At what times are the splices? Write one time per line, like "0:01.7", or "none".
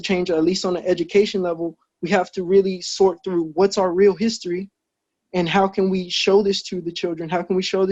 none